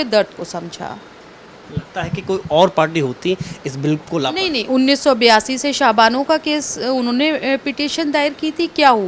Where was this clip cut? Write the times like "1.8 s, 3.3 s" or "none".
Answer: none